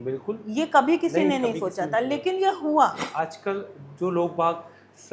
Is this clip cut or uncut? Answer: cut